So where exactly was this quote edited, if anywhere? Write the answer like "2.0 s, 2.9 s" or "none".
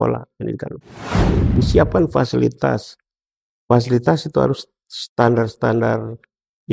1.4 s